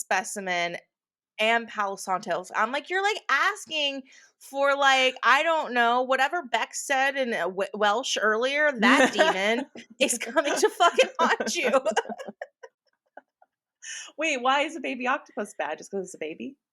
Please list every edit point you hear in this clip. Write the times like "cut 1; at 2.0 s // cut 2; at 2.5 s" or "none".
none